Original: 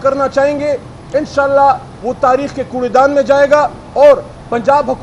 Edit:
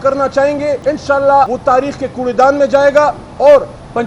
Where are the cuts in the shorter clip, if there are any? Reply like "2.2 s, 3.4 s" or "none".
0.8 s, 1.5 s